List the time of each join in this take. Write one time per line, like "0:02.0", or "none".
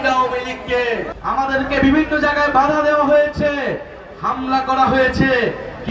0:01.1

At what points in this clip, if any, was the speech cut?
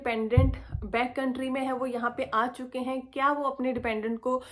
none

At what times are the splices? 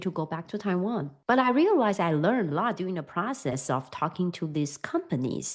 0:01.1

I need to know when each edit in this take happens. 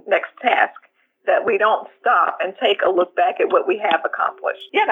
none

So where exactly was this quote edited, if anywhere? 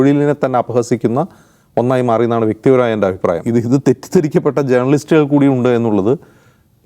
0:03.4

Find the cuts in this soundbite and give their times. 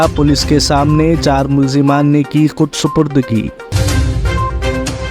0:03.7

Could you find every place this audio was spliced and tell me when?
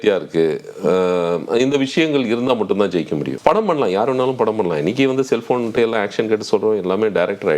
0:03.3

